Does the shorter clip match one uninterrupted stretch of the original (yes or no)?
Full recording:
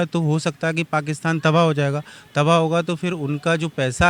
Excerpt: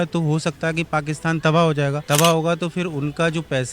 no